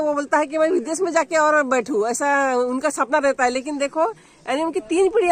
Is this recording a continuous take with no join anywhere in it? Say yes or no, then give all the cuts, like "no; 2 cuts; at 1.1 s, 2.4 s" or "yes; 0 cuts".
yes; 0 cuts